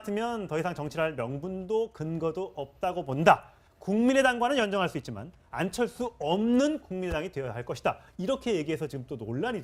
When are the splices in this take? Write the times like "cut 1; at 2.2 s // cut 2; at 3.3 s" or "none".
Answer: none